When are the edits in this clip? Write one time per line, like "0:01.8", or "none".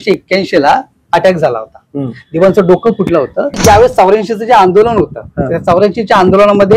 0:03.6

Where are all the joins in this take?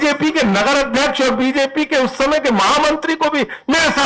none

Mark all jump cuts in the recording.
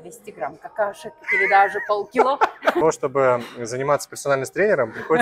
0:02.8

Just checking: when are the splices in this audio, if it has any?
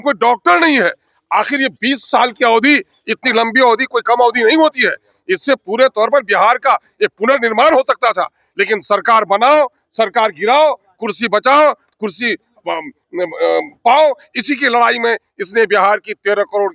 none

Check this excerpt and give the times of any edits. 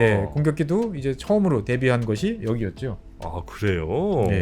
0:02.4

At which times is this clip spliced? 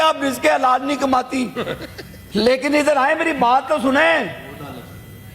none

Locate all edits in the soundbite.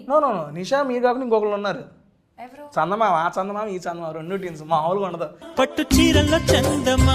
none

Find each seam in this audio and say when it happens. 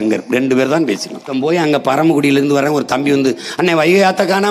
0:01.3

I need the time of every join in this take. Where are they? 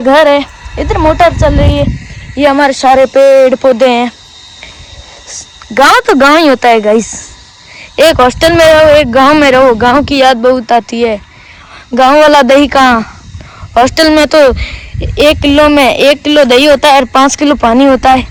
none

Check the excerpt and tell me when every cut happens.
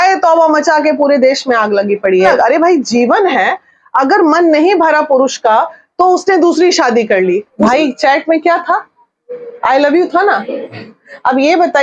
0:02.3
0:07.5

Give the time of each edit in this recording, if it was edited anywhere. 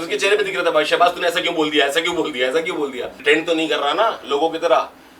0:03.1

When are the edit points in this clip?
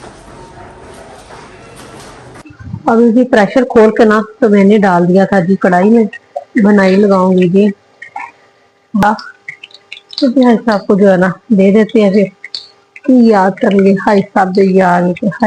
0:02.5
0:09.0

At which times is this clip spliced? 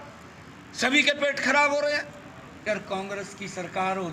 0:02.6

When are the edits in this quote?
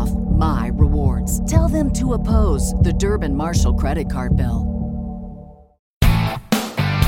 0:05.9

